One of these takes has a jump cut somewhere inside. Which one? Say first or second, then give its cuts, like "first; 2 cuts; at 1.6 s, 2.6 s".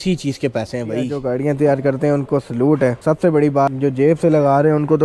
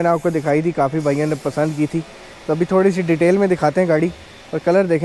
first; 3 cuts; at 1.2 s, 3.0 s, 3.7 s